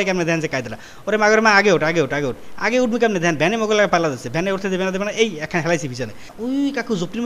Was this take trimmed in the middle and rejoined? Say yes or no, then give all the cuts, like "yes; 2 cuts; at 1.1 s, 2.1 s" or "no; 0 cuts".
yes; 1 cut; at 6.2 s